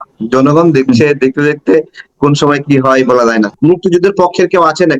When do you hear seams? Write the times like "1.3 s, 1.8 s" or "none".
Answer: 3.6 s